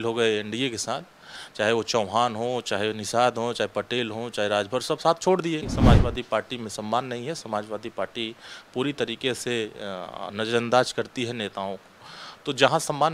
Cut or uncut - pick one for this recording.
cut